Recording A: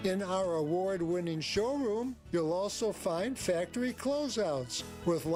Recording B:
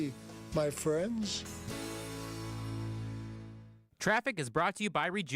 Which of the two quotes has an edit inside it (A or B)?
B